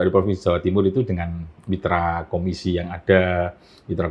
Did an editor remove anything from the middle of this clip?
no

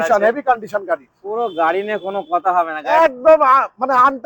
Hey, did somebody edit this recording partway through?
yes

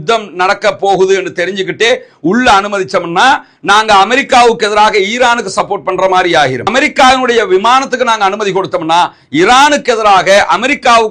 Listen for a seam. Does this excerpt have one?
no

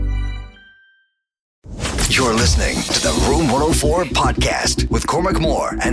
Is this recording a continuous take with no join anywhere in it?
no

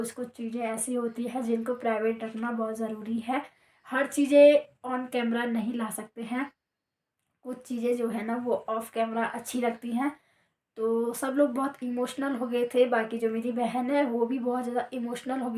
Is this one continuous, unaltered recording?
yes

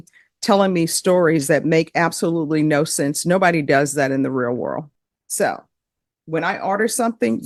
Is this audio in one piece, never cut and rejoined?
yes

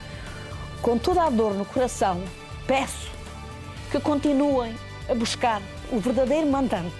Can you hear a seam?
no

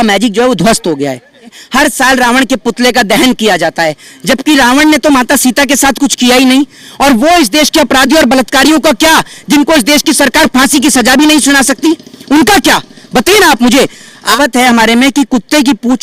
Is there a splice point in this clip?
yes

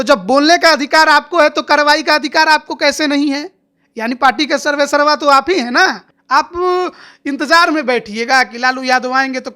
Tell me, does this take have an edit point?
yes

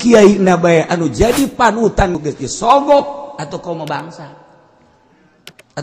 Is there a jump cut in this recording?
yes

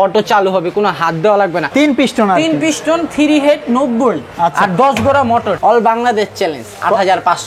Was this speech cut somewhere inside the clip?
yes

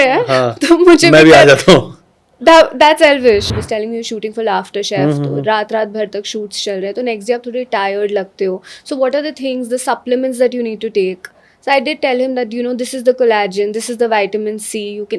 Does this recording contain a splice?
yes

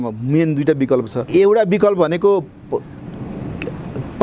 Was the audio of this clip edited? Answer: yes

